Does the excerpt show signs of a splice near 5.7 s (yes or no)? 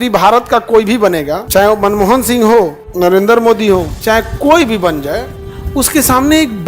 no